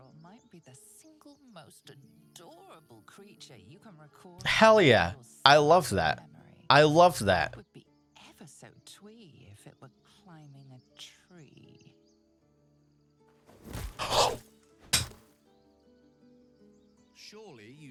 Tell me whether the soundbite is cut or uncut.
uncut